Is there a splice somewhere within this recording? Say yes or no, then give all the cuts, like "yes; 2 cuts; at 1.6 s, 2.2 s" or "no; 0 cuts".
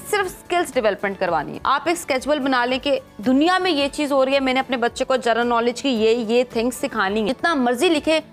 yes; 2 cuts; at 1.5 s, 7.3 s